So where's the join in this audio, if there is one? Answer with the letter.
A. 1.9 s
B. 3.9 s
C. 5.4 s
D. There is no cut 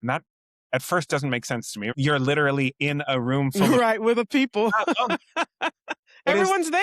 A